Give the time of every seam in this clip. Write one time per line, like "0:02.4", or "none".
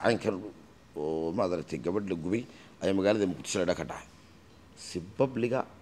none